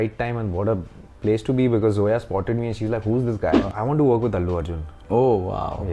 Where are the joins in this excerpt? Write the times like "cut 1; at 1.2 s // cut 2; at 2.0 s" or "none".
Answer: cut 1; at 3.7 s